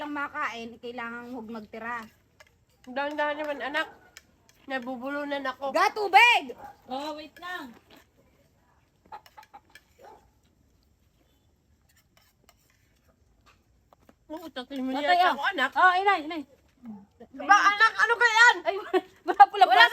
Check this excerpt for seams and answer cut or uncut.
uncut